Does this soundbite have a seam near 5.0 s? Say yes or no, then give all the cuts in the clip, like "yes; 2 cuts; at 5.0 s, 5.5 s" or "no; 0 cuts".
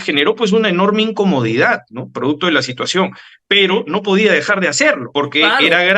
yes; 1 cut; at 5.0 s